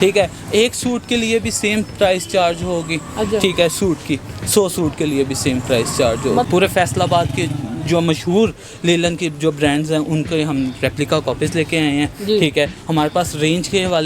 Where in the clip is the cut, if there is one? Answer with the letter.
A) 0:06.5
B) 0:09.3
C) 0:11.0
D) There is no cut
A